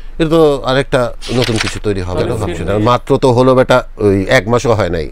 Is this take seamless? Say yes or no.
no